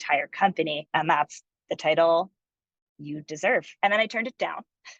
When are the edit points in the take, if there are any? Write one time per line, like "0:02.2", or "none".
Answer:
0:03.7